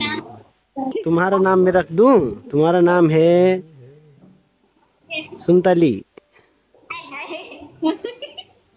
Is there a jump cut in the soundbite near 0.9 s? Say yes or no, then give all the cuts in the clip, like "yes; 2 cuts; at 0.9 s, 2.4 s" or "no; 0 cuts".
yes; 1 cut; at 0.9 s